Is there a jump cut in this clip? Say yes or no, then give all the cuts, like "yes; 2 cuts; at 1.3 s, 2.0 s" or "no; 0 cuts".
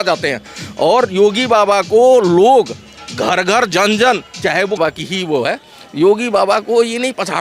yes; 1 cut; at 4.8 s